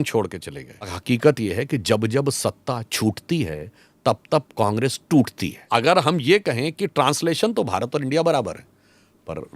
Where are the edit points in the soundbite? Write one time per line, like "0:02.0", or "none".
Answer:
0:01.0
0:05.7